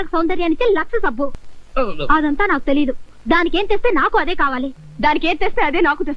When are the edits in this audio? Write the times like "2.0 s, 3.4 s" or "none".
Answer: 1.4 s, 4.8 s